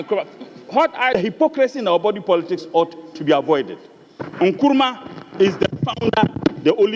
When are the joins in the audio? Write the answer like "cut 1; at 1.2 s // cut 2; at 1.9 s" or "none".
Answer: cut 1; at 1.1 s